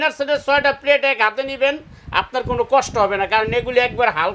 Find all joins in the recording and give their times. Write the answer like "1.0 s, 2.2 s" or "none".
none